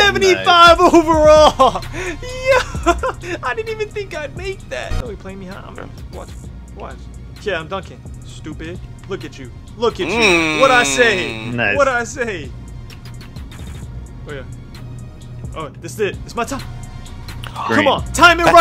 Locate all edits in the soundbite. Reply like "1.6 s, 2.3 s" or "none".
3.2 s, 5.0 s, 12.6 s

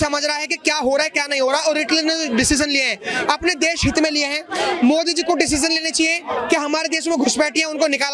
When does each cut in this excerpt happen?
none

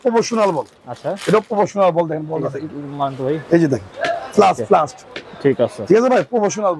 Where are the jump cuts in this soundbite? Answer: none

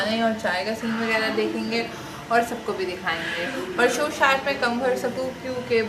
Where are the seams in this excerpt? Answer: none

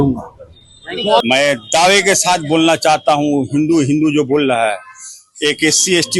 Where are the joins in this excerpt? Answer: 1.2 s

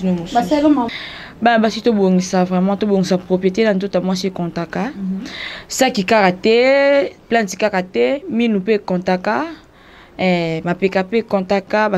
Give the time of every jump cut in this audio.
0.9 s

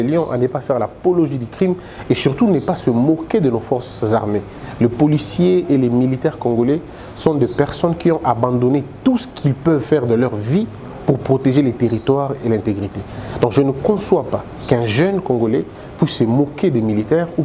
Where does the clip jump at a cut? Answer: none

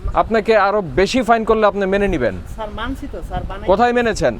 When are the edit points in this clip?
none

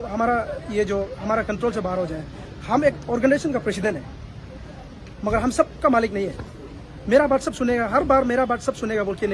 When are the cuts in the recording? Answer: none

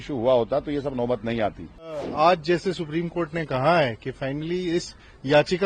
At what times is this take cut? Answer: 2.0 s

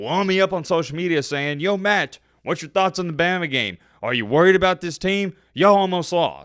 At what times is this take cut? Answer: none

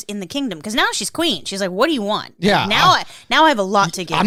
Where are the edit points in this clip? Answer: none

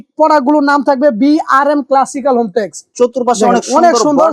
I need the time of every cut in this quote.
2.8 s

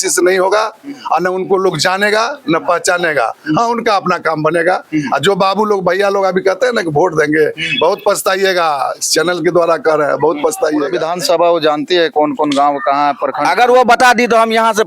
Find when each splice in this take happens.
11.0 s

